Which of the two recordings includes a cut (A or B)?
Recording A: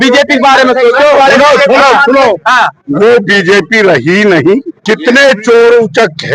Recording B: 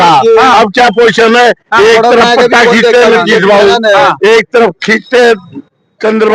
A